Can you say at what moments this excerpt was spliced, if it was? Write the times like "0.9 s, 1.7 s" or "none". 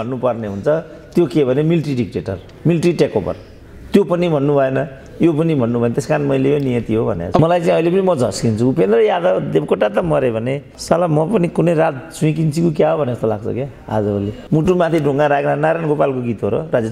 7.4 s, 14.4 s